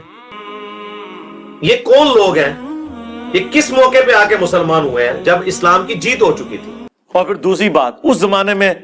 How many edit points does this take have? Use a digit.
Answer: 1